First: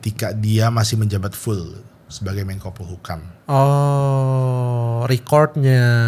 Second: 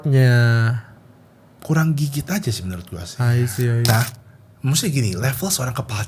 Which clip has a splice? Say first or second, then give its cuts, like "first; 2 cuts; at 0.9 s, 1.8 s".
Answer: second; 1 cut; at 3.9 s